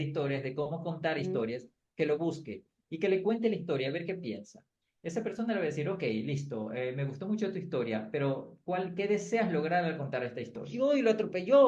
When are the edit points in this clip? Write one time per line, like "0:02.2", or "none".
0:10.7